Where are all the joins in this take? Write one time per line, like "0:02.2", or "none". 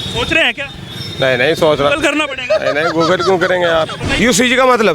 0:04.0